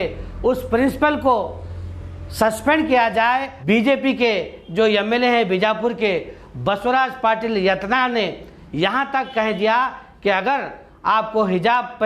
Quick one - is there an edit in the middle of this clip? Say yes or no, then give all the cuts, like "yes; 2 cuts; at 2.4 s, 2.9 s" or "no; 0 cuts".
yes; 1 cut; at 3.5 s